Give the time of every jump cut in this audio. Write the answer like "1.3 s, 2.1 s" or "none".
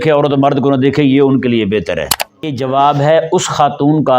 2.6 s

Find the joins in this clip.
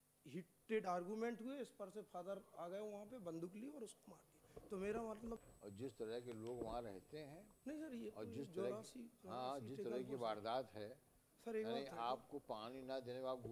5.4 s

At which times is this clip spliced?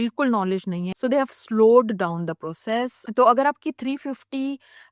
0.9 s, 3.0 s

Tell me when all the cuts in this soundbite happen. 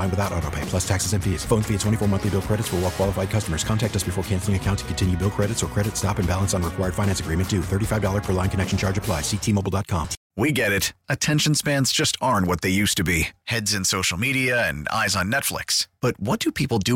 10.2 s

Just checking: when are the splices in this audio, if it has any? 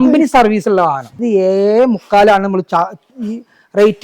1.1 s

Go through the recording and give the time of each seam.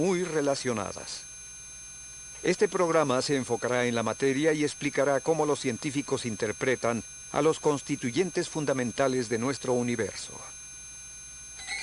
none

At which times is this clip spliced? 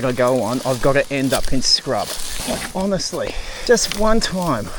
2.3 s, 3.5 s

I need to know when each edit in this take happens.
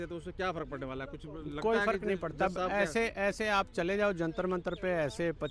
none

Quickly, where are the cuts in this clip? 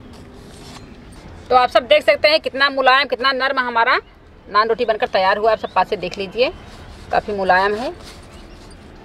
1.2 s

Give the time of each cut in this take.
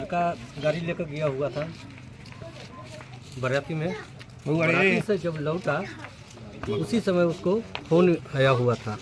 none

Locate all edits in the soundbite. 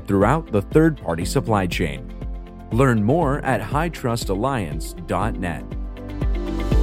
5.9 s

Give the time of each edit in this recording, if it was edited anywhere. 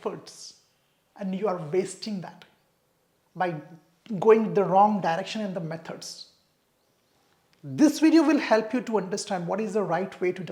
none

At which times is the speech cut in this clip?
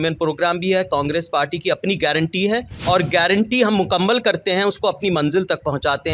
2.7 s

